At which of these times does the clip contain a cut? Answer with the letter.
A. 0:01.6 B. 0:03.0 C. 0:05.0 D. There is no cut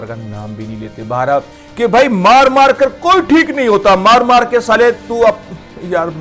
A